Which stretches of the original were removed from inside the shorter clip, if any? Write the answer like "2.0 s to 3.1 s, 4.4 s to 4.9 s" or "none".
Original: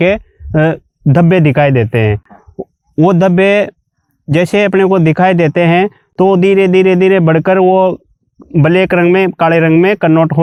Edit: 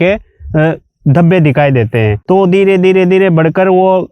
2.2 s to 6.1 s